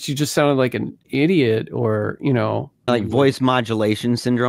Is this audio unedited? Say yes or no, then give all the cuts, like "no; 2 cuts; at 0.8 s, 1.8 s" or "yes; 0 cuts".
no; 2 cuts; at 1.0 s, 2.9 s